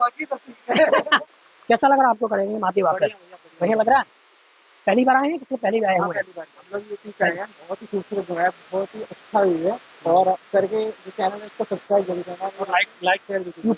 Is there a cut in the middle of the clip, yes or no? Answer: yes